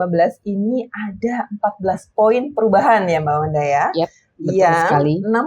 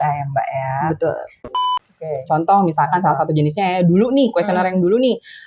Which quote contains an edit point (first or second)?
second